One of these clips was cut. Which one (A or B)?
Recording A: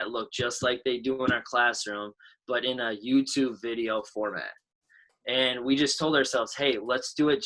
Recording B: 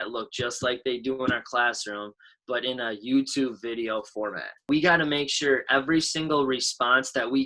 B